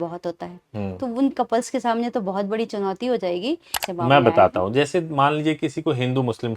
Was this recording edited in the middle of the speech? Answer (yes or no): yes